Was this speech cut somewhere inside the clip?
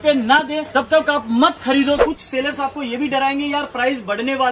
yes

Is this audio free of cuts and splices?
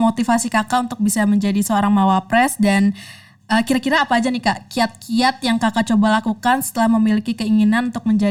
yes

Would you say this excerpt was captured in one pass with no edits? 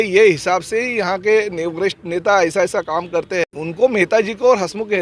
no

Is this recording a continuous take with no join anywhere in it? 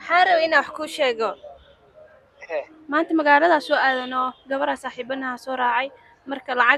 yes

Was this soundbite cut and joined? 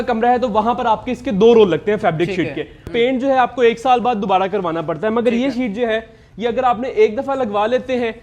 yes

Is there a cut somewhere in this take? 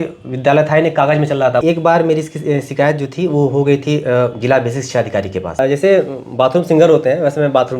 yes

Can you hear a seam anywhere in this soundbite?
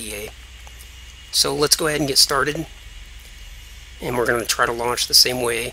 no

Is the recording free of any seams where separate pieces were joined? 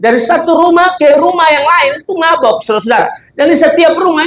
yes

